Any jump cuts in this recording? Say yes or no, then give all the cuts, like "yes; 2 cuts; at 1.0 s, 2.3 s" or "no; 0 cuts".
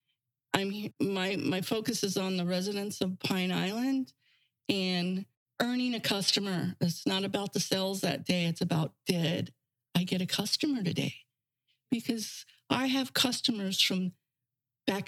yes; 2 cuts; at 1.0 s, 5.4 s